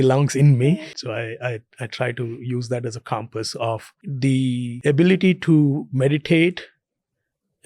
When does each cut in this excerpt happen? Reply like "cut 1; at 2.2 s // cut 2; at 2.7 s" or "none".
cut 1; at 0.9 s // cut 2; at 4.0 s // cut 3; at 4.7 s